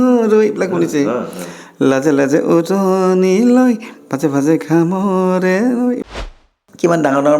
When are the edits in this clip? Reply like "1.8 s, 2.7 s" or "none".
6.1 s

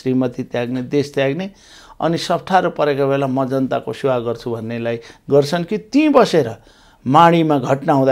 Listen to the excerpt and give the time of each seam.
none

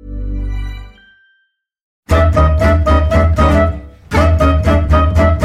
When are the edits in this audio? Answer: 2.1 s

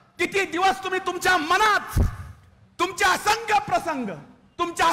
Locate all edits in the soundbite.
none

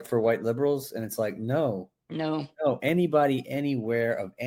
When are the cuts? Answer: none

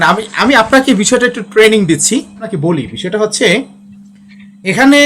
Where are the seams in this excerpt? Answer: 2.5 s

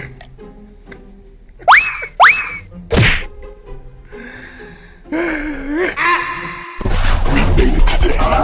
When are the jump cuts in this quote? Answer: 6.6 s

